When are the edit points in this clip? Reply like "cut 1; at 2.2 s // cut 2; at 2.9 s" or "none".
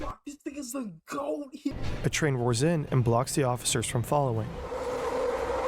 cut 1; at 1.8 s